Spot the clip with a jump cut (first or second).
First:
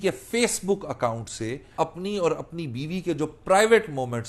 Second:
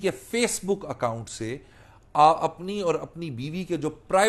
first